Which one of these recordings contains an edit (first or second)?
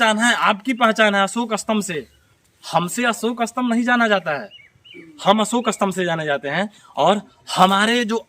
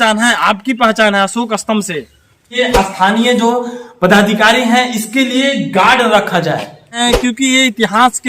second